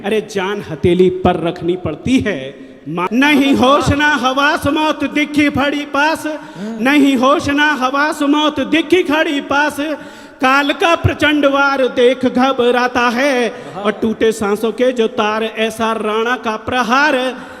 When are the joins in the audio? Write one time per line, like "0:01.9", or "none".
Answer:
0:03.1